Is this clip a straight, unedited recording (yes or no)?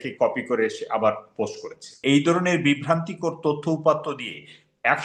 no